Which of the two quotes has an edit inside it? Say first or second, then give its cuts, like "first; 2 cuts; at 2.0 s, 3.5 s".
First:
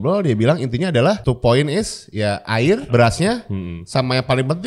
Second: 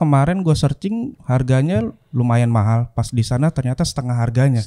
first; 2 cuts; at 1.2 s, 2.9 s